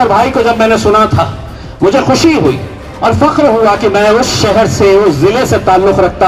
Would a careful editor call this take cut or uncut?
uncut